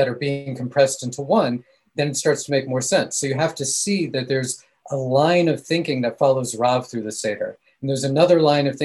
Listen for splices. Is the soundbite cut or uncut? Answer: uncut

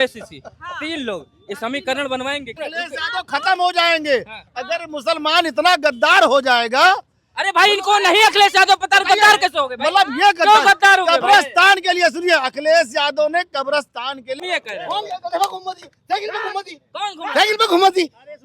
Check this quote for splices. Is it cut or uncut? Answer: cut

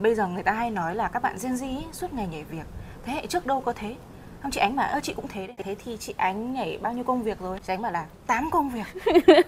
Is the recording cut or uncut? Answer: cut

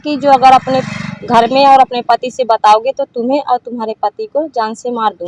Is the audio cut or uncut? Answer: uncut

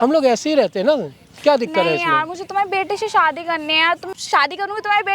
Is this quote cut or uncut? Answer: cut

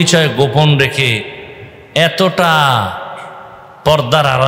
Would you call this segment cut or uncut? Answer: uncut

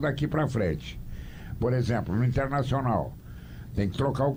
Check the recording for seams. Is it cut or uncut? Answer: uncut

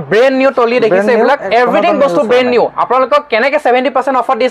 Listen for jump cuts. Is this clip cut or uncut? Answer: cut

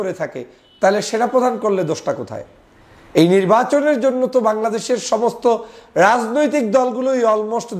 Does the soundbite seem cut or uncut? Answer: uncut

